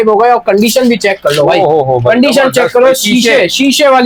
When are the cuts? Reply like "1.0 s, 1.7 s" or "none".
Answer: none